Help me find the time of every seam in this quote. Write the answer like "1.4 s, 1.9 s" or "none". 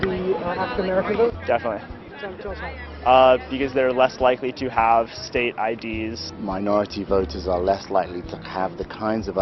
6.3 s